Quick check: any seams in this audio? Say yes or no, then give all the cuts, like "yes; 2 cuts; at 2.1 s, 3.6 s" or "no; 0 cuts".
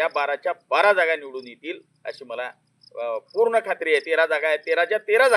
no; 0 cuts